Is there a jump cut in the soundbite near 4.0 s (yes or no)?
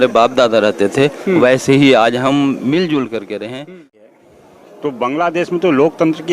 yes